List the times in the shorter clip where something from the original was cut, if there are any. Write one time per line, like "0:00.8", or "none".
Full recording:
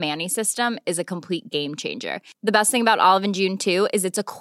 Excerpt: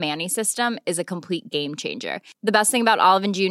none